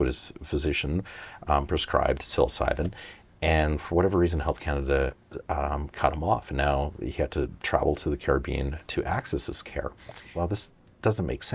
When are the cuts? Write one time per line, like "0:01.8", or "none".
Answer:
0:10.2